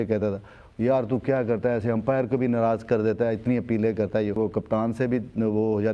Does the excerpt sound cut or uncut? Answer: cut